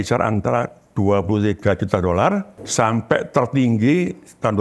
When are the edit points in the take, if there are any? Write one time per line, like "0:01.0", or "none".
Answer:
0:02.6